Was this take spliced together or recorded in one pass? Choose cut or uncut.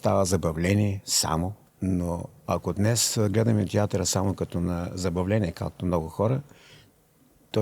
uncut